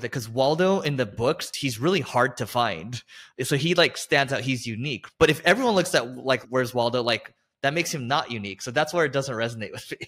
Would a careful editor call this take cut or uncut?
cut